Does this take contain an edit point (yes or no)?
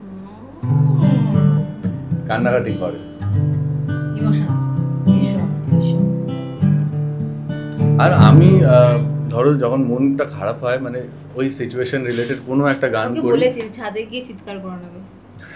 no